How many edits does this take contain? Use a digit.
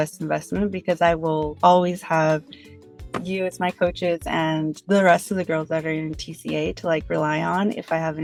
0